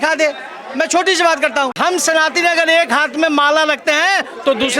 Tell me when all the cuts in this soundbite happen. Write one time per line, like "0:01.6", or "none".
0:01.8